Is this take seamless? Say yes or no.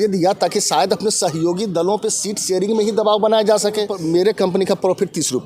no